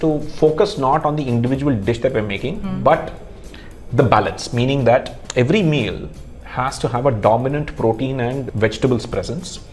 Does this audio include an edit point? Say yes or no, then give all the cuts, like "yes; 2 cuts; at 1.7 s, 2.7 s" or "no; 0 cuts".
yes; 1 cut; at 8.5 s